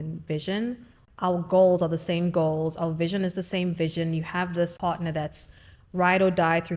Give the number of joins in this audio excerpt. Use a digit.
2